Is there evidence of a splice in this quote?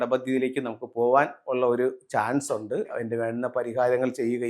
yes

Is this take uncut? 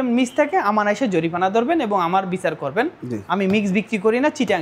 yes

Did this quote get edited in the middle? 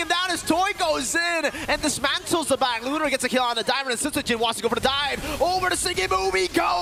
no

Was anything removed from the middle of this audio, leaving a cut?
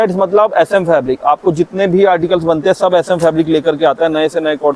no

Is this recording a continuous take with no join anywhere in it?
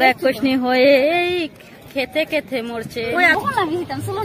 no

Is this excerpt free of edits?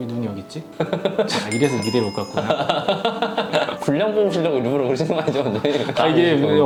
yes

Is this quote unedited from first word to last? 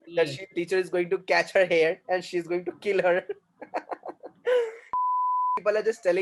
no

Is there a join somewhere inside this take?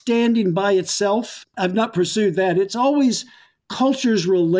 no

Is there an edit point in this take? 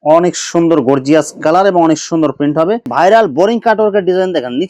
yes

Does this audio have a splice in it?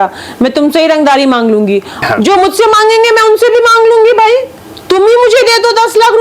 yes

